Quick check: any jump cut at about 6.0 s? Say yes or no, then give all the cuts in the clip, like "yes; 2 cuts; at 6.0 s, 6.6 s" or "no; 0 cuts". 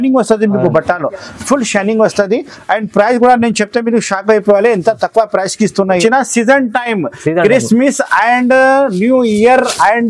yes; 1 cut; at 6.0 s